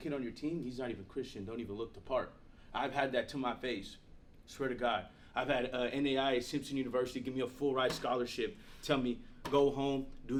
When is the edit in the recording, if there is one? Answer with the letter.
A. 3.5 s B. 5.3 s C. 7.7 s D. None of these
D